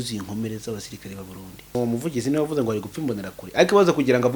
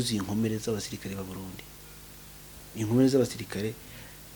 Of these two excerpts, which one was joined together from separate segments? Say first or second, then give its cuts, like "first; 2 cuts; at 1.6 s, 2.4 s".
first; 1 cut; at 1.8 s